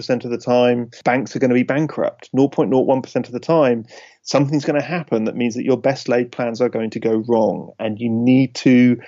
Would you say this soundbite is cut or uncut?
cut